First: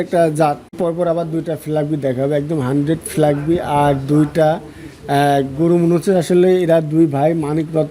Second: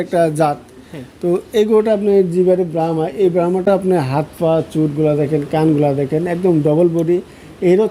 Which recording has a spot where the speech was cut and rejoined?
first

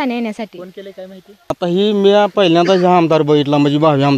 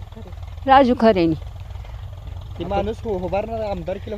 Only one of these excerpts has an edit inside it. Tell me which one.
first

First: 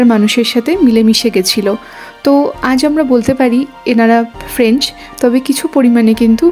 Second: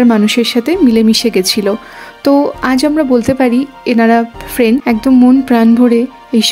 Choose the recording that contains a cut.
second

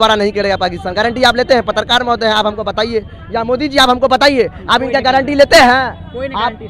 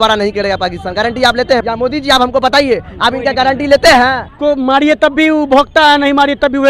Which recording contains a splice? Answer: second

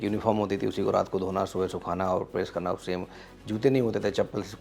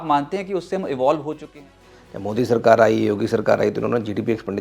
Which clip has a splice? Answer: second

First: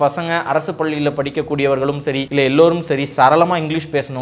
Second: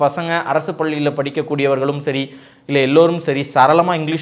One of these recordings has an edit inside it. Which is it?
first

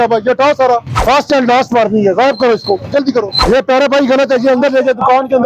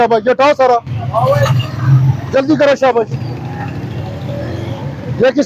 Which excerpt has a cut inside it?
first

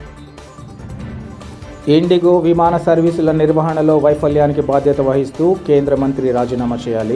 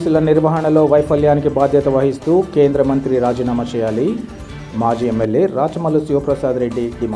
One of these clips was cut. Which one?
first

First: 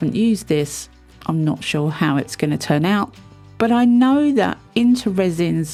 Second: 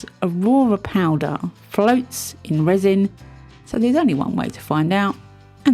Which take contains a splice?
second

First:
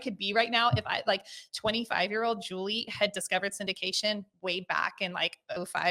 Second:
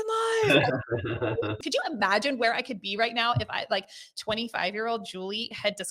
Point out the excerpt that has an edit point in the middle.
second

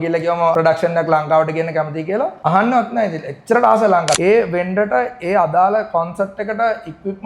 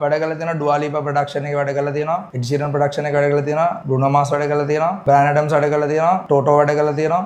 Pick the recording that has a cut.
first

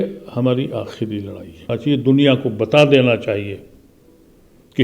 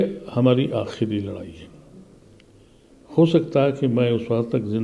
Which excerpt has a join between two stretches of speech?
first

